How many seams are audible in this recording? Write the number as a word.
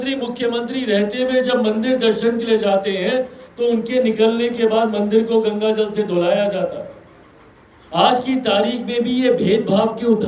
zero